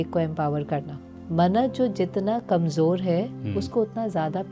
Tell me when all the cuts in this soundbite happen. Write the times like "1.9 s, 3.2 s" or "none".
none